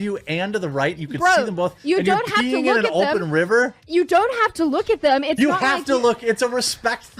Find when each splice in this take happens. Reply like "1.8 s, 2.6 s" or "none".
none